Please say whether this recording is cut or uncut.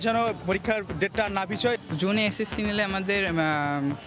cut